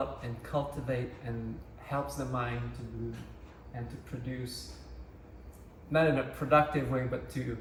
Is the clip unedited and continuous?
yes; 0 cuts

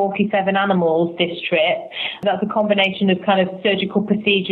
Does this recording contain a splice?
yes; 1 cut; at 2.2 s

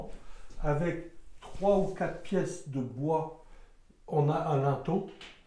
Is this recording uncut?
yes; 0 cuts

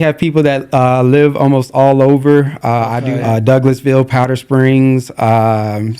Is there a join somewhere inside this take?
yes; 1 cut; at 3.0 s

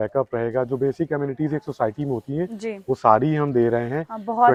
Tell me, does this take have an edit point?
no; 0 cuts

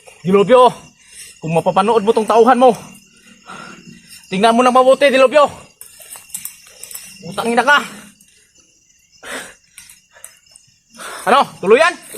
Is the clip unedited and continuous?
yes; 0 cuts

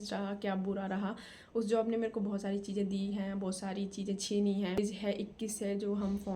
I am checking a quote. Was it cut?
yes; 1 cut; at 4.8 s

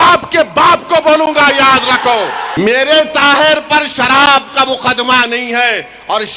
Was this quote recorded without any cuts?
no; 1 cut; at 2.4 s

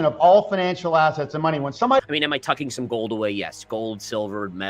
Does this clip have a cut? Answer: yes; 1 cut; at 2.0 s

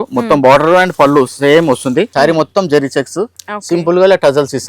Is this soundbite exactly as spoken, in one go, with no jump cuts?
no; 1 cut; at 2.1 s

